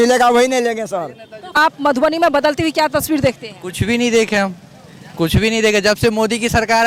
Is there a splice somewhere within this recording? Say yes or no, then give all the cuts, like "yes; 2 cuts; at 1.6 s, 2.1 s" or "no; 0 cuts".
yes; 1 cut; at 1.5 s